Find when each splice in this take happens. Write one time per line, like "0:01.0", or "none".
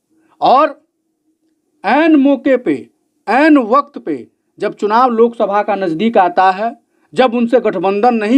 none